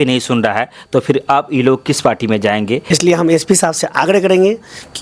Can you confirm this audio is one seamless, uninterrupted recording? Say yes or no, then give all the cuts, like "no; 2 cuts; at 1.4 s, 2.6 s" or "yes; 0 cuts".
no; 1 cut; at 2.8 s